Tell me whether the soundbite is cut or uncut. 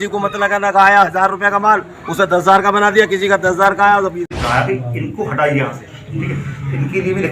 cut